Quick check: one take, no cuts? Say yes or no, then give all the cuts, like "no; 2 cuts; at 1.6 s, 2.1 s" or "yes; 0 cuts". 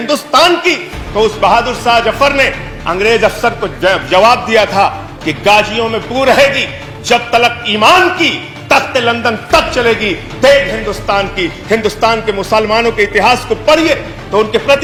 yes; 0 cuts